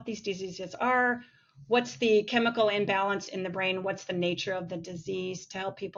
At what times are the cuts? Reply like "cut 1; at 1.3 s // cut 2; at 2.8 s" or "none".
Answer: none